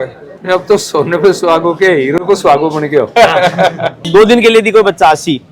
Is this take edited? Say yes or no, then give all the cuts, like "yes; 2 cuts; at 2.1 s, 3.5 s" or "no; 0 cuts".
yes; 1 cut; at 4.0 s